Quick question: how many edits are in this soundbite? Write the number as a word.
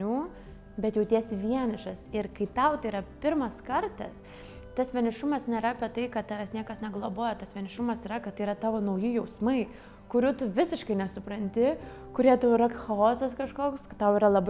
zero